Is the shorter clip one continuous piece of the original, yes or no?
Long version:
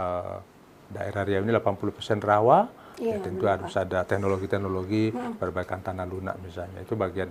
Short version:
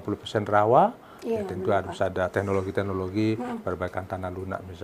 yes